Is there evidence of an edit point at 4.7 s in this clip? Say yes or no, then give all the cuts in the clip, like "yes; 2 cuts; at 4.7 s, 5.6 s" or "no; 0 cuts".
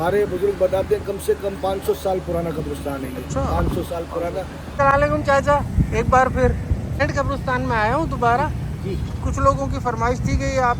yes; 2 cuts; at 4.7 s, 7.0 s